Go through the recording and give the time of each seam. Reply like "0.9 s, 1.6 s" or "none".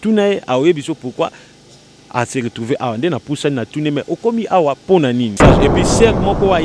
5.4 s